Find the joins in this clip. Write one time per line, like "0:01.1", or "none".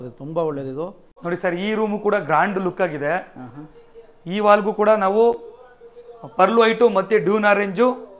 0:01.1